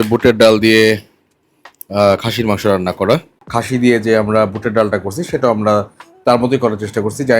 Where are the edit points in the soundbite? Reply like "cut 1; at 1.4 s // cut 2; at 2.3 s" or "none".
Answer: cut 1; at 3.4 s